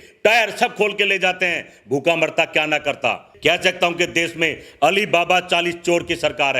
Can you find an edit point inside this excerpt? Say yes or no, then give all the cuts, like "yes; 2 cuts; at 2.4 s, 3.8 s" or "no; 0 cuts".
yes; 1 cut; at 3.3 s